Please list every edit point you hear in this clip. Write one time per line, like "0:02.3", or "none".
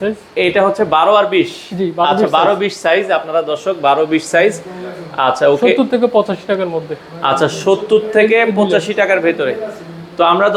none